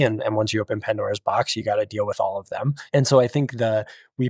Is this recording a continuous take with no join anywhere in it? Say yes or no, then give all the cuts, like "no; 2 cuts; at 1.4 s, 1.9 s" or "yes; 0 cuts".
no; 1 cut; at 2.8 s